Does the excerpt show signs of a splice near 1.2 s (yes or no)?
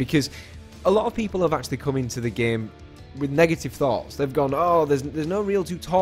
yes